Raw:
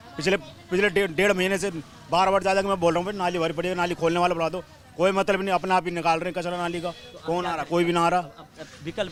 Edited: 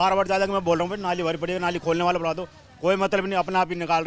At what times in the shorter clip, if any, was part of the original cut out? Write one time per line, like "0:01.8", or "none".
none